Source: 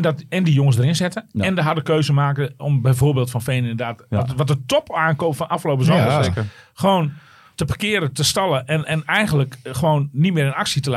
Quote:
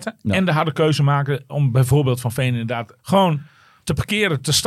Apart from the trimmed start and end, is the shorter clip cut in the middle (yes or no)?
yes